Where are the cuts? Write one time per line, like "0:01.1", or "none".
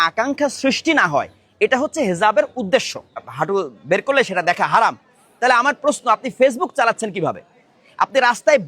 0:03.3